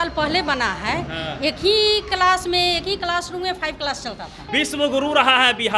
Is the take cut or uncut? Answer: cut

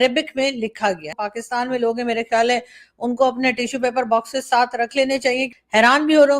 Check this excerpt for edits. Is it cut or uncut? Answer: cut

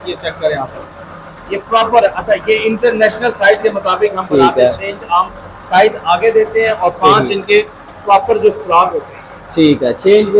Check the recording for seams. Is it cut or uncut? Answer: uncut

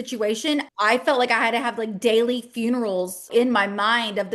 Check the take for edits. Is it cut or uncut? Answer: cut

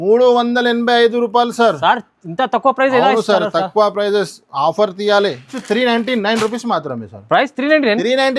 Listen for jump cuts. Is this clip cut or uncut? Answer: cut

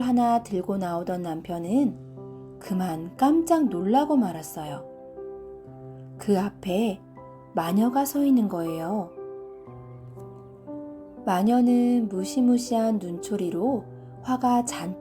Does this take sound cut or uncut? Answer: uncut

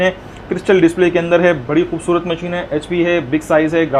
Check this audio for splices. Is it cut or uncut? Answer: uncut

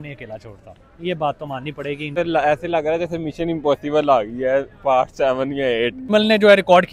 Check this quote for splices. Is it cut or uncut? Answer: cut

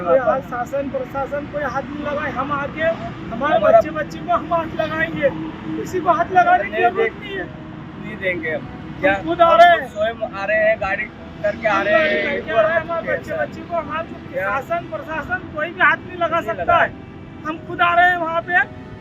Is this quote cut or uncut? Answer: uncut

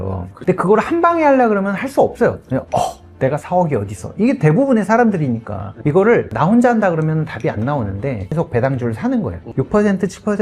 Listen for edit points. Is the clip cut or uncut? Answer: cut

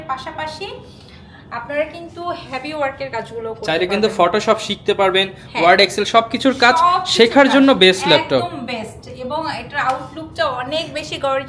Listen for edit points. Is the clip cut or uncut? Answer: uncut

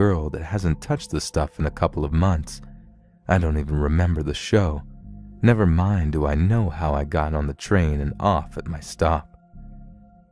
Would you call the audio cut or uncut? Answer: uncut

